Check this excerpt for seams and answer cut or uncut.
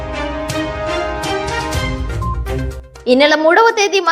cut